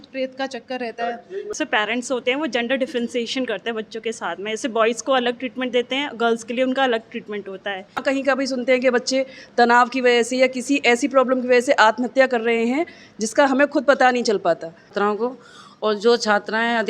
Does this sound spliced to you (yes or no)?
yes